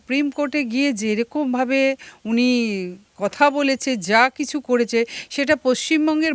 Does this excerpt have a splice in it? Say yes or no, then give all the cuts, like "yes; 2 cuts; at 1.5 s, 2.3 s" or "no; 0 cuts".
no; 0 cuts